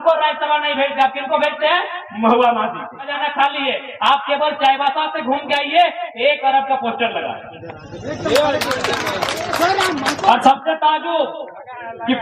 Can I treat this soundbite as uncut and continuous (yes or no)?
no